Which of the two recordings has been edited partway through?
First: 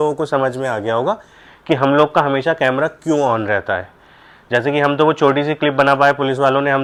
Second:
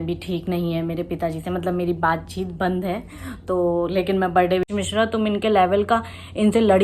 second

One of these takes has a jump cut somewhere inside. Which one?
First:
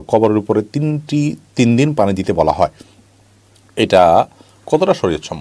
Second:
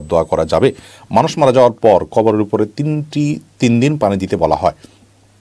second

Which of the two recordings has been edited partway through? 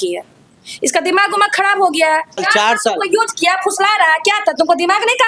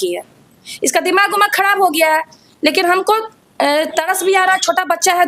first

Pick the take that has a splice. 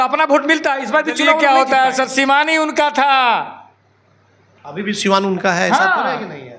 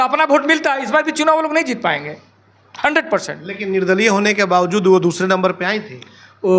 first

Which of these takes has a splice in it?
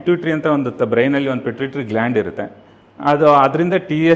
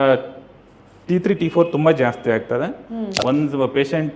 second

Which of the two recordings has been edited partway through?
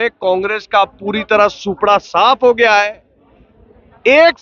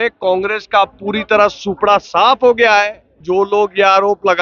second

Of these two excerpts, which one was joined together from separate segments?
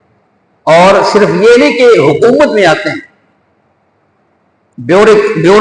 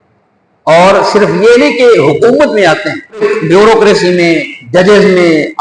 second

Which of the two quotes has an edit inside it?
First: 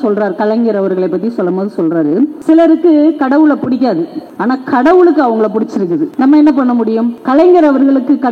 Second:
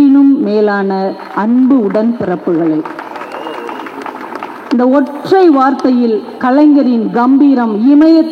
first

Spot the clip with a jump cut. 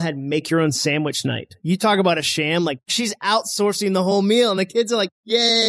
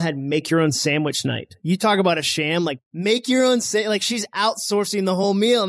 first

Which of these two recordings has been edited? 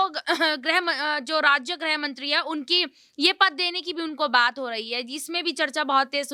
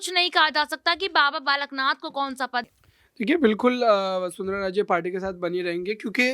second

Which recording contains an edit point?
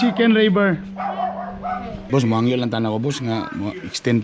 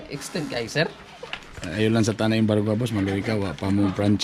first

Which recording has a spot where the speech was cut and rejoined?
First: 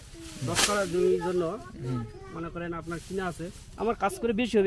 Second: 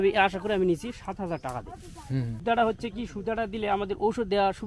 second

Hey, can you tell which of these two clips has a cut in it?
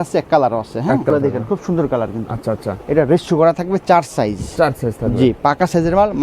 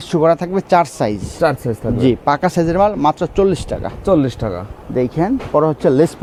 first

